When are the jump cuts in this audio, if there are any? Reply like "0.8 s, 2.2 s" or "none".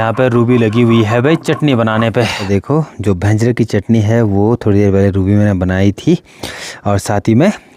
2.4 s